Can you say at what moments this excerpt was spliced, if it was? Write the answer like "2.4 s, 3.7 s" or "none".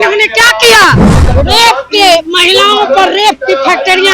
1.1 s